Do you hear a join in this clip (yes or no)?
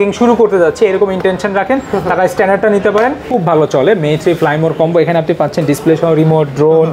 yes